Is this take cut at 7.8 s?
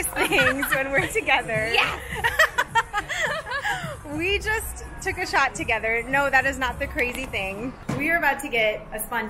yes; 1 cut; at 7.8 s

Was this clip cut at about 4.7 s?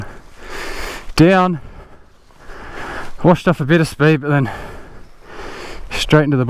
no; 0 cuts

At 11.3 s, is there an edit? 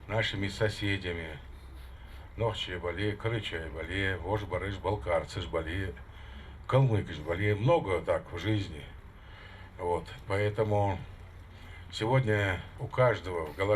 no; 1 cut; at 12.8 s

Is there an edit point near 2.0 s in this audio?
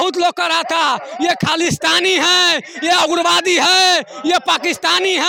no; 0 cuts

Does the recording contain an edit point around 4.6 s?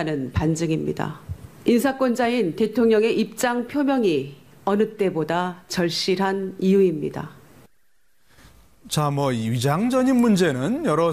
no; 1 cut; at 1.6 s

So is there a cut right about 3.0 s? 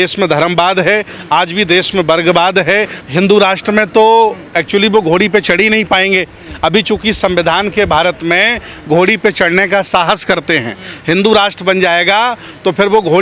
yes; 1 cut; at 3.0 s

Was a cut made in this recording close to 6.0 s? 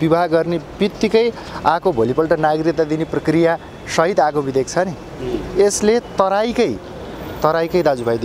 no; 0 cuts

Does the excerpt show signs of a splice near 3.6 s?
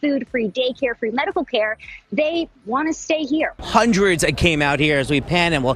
yes; 1 cut; at 3.6 s

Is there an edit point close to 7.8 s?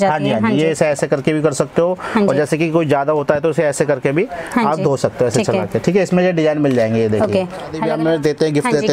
yes; 1 cut; at 7.8 s

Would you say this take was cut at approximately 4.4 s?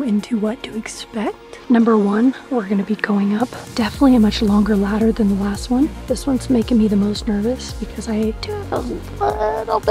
no; 3 cuts; at 1.5 s, 6.1 s, 8.5 s

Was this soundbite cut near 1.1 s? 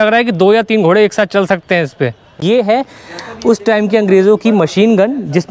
no; 1 cut; at 2.4 s

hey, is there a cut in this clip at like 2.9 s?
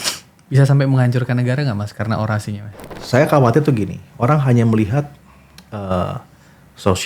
yes; 1 cut; at 2.9 s

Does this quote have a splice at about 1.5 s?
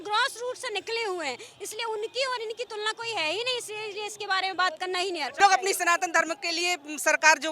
no; 1 cut; at 5.4 s

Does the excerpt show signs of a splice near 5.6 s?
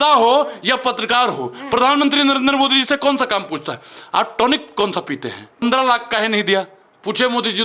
yes; 1 cut; at 5.6 s

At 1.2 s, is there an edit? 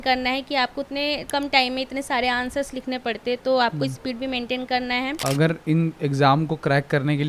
yes; 2 cuts; at 1.2 s, 5.2 s

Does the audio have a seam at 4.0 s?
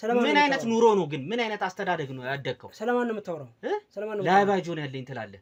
no; 0 cuts

